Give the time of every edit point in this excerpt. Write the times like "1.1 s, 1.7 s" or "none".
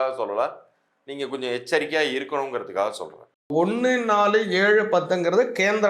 3.3 s